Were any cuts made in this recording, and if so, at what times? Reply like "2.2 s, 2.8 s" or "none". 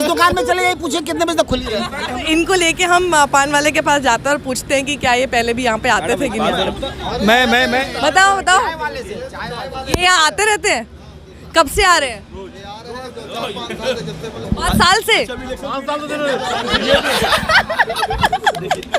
2.3 s